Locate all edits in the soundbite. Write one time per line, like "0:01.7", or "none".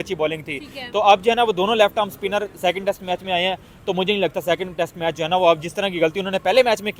none